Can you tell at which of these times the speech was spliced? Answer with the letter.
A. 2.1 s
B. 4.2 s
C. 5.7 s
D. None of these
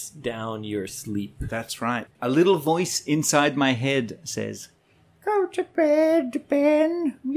A